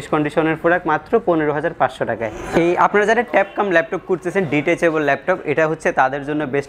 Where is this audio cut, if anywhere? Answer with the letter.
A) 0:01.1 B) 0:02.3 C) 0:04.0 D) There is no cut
B